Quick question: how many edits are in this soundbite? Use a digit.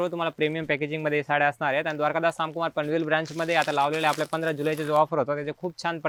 0